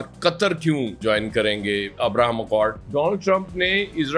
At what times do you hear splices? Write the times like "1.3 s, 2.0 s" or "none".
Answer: 2.8 s